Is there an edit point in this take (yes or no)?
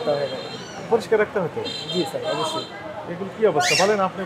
no